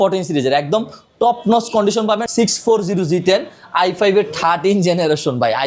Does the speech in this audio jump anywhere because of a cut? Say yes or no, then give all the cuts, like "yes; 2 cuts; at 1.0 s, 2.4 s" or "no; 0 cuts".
yes; 1 cut; at 2.3 s